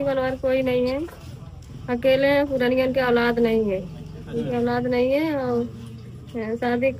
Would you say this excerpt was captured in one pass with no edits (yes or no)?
yes